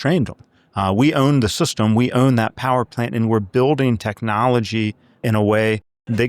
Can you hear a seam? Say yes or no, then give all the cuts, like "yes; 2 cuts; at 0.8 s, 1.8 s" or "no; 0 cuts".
yes; 1 cut; at 5.2 s